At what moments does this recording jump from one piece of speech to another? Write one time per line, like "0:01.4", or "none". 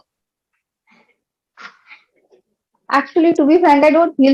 none